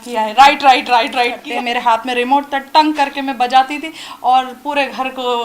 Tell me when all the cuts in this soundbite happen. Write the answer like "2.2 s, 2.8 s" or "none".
1.4 s